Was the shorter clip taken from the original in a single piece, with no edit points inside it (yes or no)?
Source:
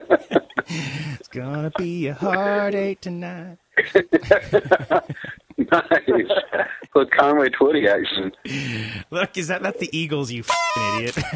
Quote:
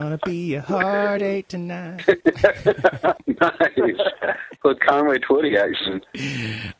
no